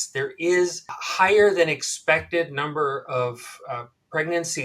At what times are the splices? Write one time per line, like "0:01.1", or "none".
0:01.0

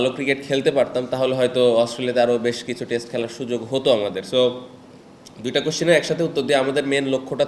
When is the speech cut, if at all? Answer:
none

